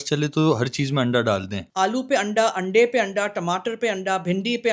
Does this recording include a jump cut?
yes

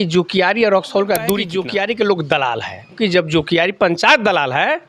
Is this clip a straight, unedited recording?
no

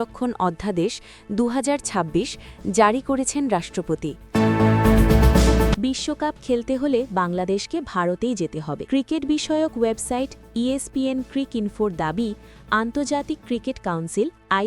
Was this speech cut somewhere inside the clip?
yes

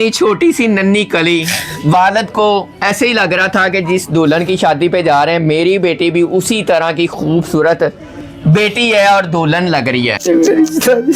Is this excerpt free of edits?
no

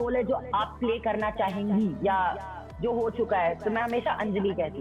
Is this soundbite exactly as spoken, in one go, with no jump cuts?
yes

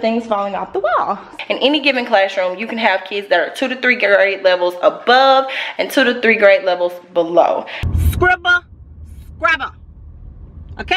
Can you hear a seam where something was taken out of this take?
yes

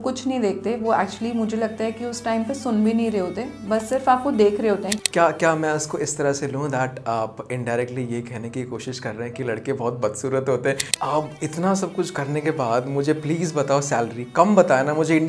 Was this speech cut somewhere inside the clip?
yes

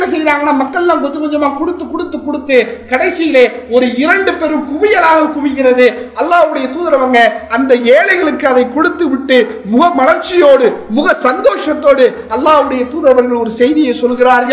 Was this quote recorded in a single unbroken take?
yes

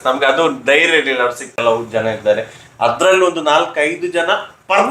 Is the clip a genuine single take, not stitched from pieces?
no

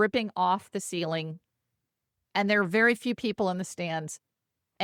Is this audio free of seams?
yes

